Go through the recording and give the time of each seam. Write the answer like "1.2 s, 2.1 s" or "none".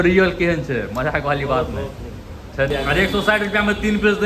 2.7 s